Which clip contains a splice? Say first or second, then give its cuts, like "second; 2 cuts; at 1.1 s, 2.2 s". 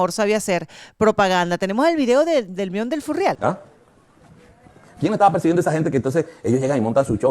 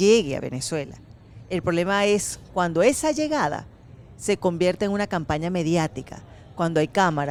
first; 1 cut; at 3.4 s